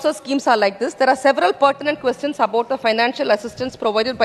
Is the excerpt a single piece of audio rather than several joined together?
yes; 0 cuts

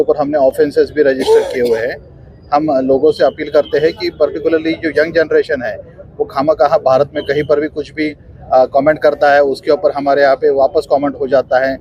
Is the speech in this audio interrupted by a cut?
no; 0 cuts

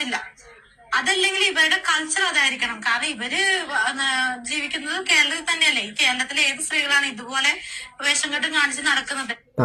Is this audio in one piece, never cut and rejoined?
yes; 0 cuts

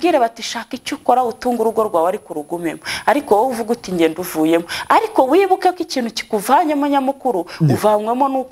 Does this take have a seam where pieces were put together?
no; 0 cuts

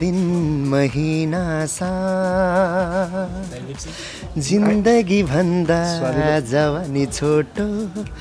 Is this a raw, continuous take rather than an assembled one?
yes; 0 cuts

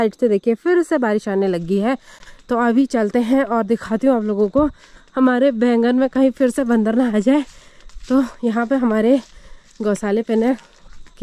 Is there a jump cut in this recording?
no; 0 cuts

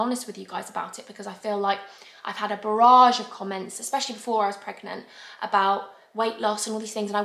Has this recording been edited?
no; 0 cuts

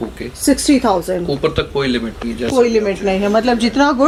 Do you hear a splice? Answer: no; 0 cuts

